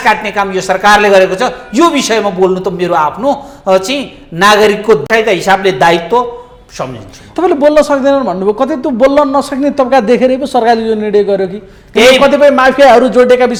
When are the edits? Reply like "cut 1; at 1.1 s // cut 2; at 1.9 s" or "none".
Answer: none